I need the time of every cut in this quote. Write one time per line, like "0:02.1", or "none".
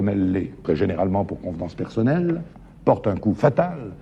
none